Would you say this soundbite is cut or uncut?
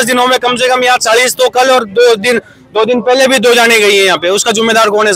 uncut